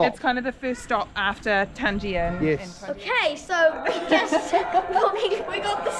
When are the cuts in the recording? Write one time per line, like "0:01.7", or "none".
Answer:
0:02.7